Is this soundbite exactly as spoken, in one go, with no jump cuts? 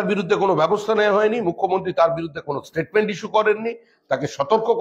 yes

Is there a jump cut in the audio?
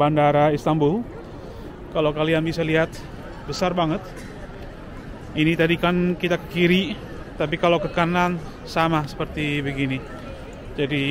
no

